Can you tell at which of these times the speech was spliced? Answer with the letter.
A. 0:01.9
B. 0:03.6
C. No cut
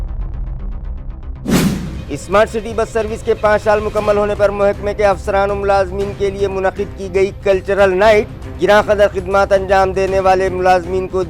A